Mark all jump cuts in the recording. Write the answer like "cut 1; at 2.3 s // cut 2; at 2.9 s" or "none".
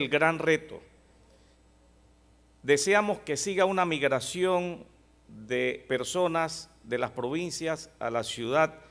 cut 1; at 2.6 s